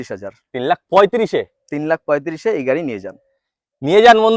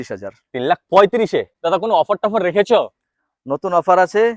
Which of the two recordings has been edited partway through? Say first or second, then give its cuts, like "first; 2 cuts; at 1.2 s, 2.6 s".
second; 1 cut; at 1.5 s